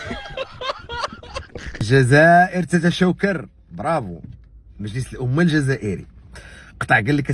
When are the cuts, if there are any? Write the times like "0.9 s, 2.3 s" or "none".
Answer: 1.8 s